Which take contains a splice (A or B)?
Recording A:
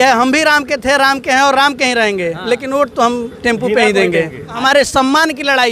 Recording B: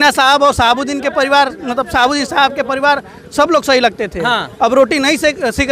A